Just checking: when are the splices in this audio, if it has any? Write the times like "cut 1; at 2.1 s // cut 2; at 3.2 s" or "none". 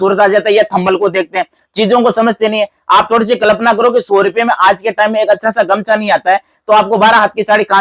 none